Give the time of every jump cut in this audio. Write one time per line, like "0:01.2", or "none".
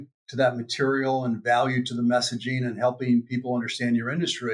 none